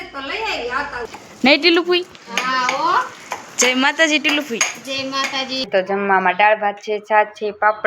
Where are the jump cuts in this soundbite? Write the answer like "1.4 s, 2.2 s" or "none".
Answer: 1.1 s, 5.7 s